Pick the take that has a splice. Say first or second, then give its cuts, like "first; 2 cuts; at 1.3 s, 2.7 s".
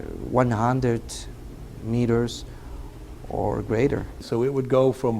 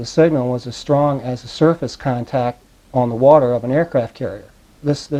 first; 1 cut; at 4.1 s